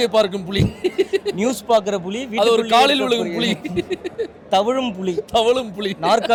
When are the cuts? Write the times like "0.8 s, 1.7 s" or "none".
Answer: none

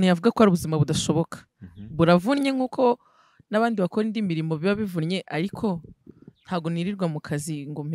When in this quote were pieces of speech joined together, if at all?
none

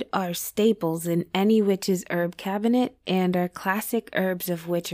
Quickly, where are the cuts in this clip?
none

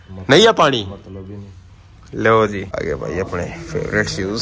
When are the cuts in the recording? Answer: 2.7 s

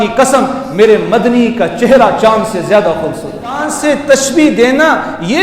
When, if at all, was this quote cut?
3.6 s

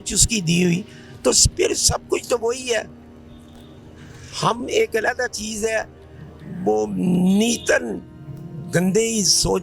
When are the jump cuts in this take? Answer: none

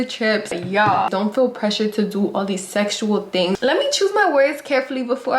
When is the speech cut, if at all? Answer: 1.0 s, 3.6 s

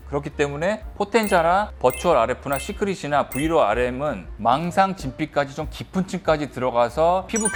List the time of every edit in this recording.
none

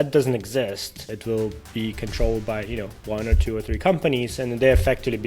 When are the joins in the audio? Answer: 1.1 s

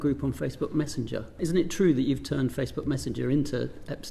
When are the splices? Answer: 1.3 s

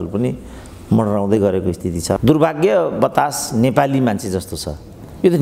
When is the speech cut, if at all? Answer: 2.2 s

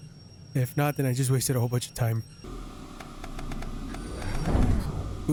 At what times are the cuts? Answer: none

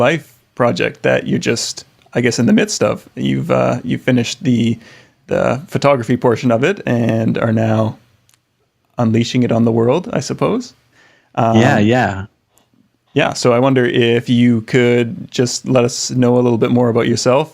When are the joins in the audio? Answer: 6.3 s

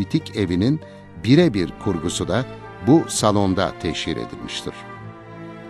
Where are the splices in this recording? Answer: 4.7 s

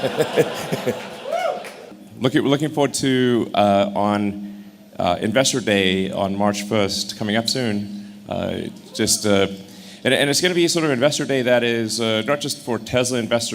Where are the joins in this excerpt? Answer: 1.9 s

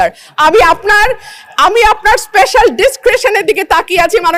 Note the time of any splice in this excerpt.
none

